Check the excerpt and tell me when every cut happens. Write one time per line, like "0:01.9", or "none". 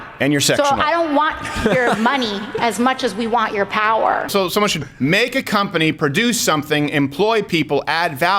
0:04.3